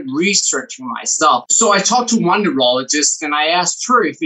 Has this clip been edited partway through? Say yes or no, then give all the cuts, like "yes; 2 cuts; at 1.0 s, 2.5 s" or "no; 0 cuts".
yes; 1 cut; at 1.5 s